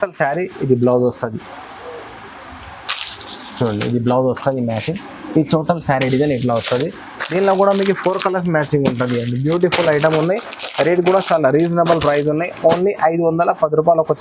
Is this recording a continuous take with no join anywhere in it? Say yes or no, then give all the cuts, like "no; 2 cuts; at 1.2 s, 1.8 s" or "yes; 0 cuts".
yes; 0 cuts